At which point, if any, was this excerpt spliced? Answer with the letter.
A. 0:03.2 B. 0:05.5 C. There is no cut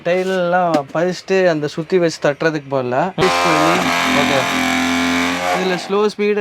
A